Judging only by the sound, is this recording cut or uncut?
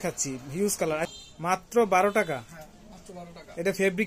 cut